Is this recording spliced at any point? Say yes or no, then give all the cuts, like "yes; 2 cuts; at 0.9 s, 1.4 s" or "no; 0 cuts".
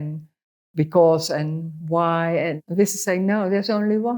yes; 1 cut; at 2.6 s